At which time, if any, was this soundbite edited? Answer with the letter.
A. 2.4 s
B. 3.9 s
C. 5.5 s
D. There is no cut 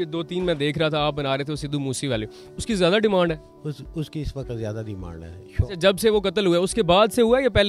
D